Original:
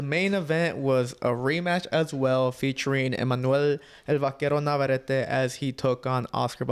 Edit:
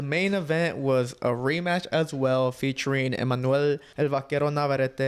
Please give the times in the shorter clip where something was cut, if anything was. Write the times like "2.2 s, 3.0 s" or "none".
3.9 s